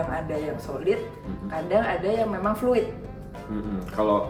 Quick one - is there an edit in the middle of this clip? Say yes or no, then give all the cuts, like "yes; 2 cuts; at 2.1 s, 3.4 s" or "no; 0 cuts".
no; 0 cuts